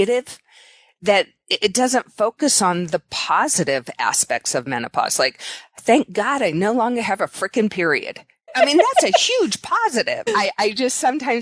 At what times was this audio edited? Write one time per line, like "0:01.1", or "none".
0:08.5
0:10.2